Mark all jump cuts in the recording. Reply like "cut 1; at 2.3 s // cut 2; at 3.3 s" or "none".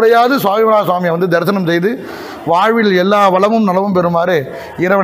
none

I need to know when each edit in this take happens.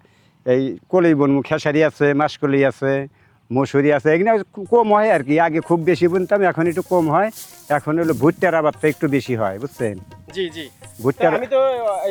none

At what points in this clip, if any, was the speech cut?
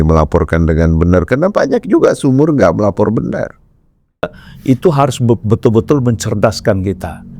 cut 1; at 4.5 s

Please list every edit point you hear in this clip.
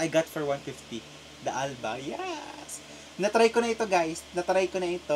none

